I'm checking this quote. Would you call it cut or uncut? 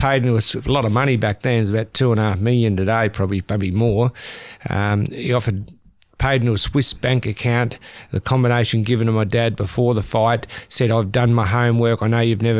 uncut